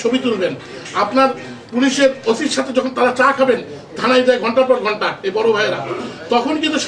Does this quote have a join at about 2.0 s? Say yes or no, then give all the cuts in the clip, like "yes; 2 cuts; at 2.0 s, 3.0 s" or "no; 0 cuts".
no; 0 cuts